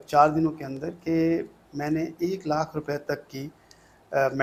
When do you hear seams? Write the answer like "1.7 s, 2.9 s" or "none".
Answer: none